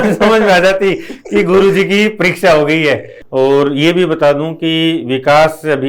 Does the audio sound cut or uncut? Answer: cut